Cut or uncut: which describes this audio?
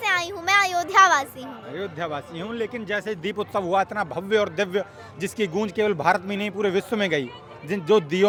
uncut